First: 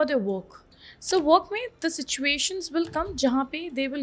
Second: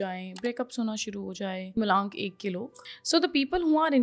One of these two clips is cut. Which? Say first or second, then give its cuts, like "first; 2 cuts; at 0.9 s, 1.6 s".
second; 2 cuts; at 1.8 s, 2.8 s